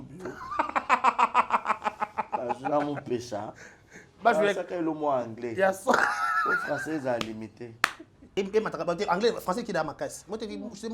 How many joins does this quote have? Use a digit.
1